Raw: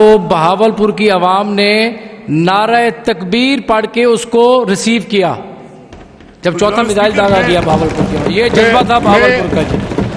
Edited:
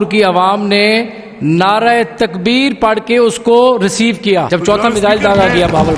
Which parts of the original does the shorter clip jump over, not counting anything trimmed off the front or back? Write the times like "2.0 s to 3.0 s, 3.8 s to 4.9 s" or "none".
5.3 s to 6.4 s